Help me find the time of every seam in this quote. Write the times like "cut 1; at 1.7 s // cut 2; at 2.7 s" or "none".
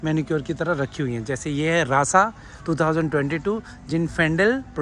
none